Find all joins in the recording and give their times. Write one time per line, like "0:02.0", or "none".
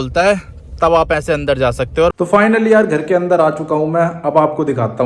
0:02.1